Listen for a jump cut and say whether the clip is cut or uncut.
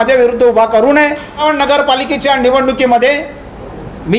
cut